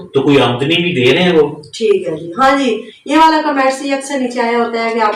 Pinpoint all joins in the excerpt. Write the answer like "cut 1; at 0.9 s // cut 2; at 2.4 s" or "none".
none